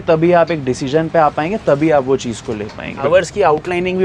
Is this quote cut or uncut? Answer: cut